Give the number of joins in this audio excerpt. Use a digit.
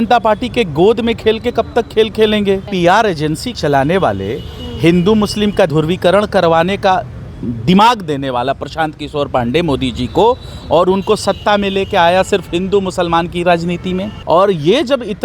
4